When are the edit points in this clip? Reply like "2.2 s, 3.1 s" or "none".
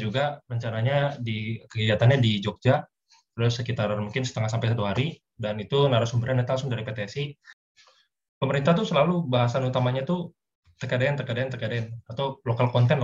7.5 s

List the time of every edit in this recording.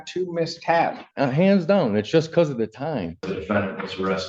1.0 s, 3.3 s

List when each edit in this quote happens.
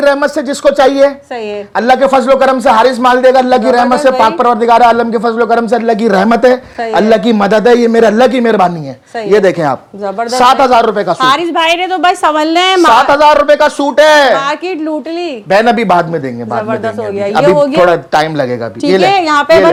none

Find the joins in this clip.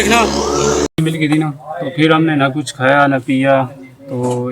1.0 s

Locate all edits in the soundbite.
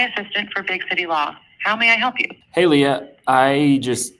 2.3 s

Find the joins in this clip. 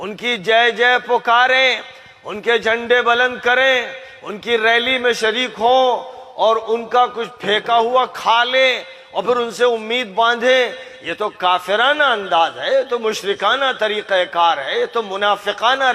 none

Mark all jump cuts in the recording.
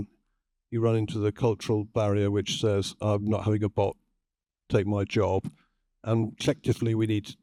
none

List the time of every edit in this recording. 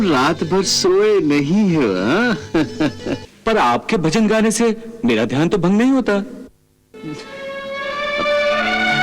3.2 s

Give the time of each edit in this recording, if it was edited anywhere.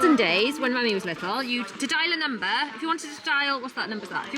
none

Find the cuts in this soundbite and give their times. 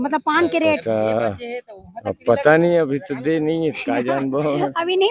none

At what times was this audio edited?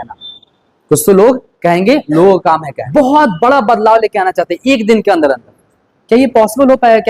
2.8 s

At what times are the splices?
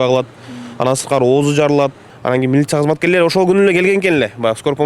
2.1 s

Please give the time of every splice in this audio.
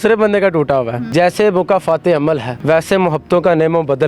1.0 s, 2.5 s

